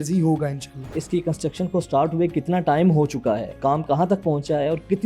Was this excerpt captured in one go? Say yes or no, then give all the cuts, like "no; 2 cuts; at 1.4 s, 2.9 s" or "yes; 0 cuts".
no; 2 cuts; at 1.0 s, 3.6 s